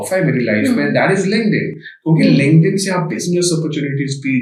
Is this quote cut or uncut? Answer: uncut